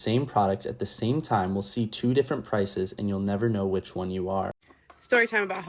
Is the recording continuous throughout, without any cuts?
no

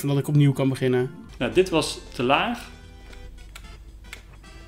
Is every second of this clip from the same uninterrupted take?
no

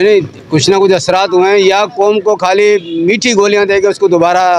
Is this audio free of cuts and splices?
yes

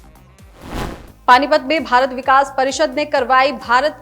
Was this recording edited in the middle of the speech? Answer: yes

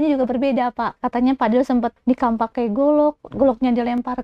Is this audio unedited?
no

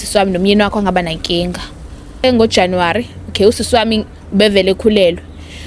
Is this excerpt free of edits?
no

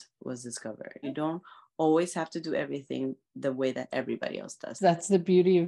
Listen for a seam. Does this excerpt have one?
yes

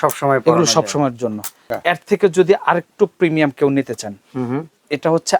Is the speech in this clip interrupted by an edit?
yes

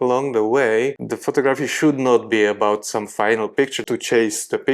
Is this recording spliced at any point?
yes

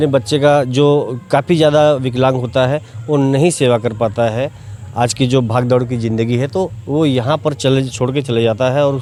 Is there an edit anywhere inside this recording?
no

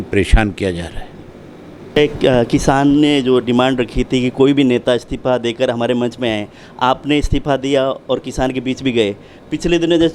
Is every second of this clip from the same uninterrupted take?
no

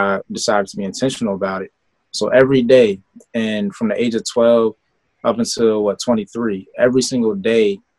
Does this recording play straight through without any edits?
yes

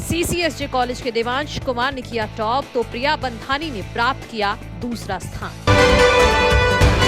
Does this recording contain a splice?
yes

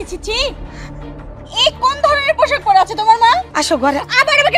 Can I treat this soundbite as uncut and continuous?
no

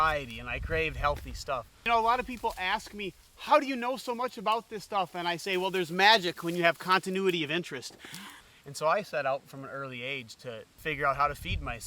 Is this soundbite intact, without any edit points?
no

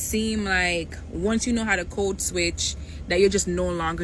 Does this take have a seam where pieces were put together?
no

